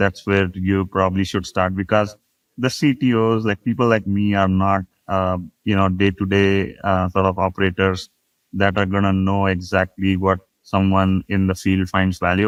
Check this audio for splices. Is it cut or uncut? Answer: uncut